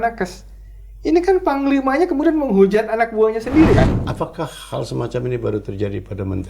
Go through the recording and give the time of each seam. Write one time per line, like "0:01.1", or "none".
0:03.9